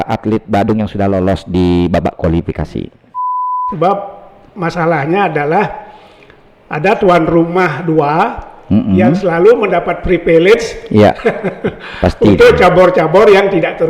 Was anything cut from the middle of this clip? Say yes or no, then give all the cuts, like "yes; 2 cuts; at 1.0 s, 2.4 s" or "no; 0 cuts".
yes; 1 cut; at 3.4 s